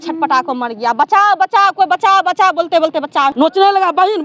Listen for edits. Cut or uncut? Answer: cut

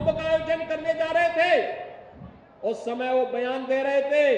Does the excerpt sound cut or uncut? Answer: uncut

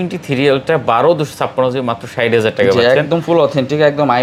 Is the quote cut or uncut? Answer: uncut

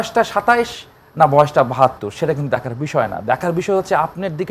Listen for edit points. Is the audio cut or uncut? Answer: uncut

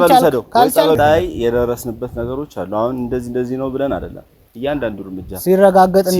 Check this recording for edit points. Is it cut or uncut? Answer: cut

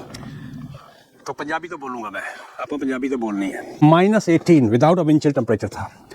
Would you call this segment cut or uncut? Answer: cut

